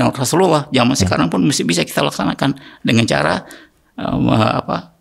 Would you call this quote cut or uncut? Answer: uncut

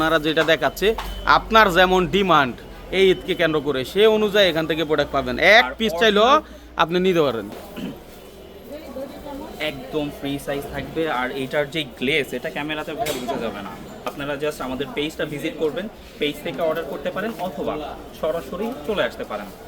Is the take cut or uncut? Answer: cut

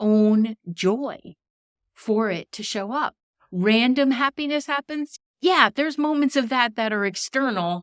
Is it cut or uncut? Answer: cut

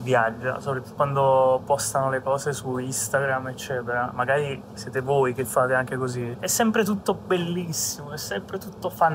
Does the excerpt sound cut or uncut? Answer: cut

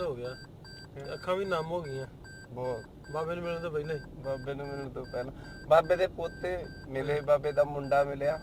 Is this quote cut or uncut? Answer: uncut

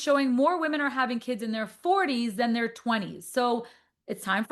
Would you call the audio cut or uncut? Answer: uncut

